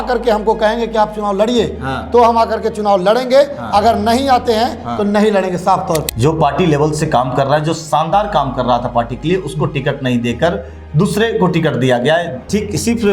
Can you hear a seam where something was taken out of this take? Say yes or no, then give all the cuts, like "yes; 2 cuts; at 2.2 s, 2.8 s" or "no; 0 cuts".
yes; 1 cut; at 6.1 s